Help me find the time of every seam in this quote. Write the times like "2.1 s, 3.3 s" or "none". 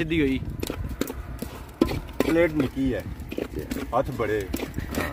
none